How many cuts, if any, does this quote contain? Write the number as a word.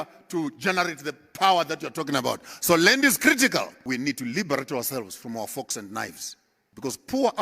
one